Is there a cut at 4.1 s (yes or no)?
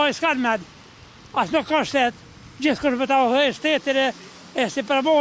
no